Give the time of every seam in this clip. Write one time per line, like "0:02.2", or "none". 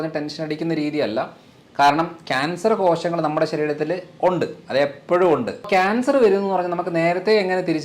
0:05.7